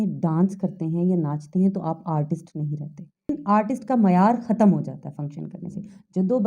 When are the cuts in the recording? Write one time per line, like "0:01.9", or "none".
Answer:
0:03.3